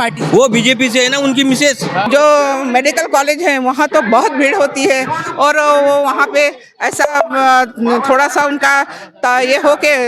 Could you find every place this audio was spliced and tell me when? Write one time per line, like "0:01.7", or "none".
0:02.1